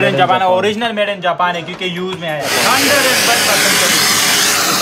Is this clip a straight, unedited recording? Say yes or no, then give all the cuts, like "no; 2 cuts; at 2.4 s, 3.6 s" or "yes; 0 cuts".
no; 1 cut; at 2.5 s